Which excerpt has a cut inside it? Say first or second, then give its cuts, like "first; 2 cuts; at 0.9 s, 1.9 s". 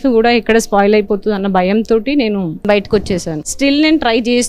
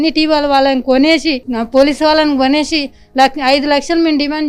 first; 2 cuts; at 2.6 s, 3.4 s